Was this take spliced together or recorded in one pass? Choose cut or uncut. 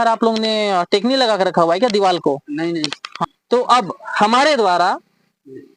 cut